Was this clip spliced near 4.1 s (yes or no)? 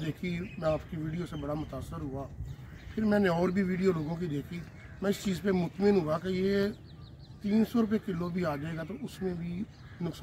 no